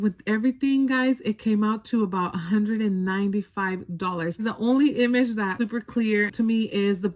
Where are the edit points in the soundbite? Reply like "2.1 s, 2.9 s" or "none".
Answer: 4.5 s, 5.5 s